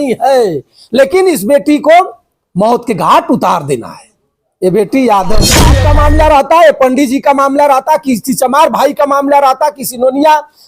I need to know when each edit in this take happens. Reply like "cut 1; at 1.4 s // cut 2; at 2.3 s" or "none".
cut 1; at 5.7 s